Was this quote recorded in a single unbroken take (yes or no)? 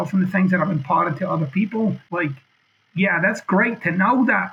no